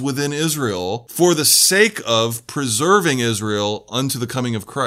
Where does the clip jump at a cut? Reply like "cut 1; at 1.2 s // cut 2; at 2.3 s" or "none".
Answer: cut 1; at 1.0 s